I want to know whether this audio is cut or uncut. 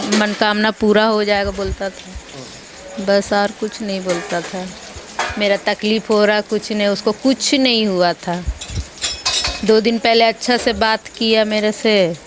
uncut